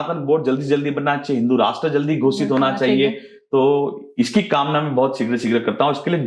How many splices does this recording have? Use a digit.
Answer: 0